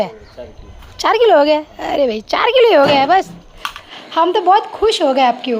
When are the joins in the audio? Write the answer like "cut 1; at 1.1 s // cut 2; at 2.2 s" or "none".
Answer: cut 1; at 3.7 s